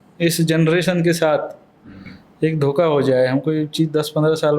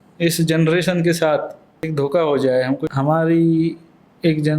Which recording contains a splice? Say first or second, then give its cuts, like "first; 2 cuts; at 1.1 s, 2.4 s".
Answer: second; 2 cuts; at 1.9 s, 2.9 s